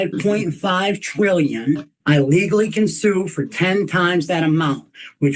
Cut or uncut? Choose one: cut